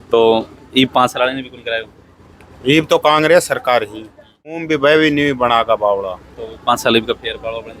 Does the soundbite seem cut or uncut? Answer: cut